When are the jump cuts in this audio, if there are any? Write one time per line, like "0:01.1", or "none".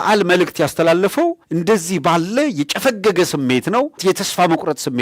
0:04.0